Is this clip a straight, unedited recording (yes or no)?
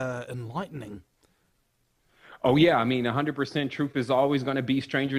yes